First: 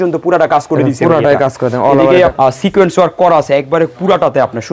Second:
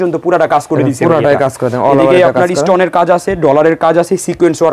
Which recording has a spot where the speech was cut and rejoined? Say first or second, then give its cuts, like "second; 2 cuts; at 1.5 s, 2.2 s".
first; 1 cut; at 2.3 s